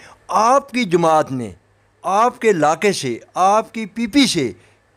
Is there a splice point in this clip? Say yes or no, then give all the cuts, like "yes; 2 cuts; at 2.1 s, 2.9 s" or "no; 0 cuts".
no; 0 cuts